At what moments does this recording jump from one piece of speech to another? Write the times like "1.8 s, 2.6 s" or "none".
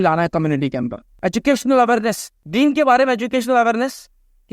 1.0 s, 2.3 s